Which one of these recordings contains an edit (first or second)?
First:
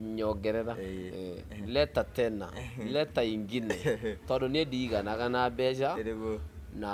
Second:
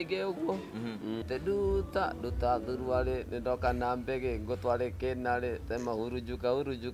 second